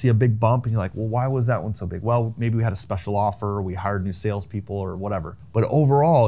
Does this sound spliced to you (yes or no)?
no